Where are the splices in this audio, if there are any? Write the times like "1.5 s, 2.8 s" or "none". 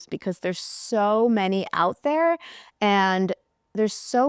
none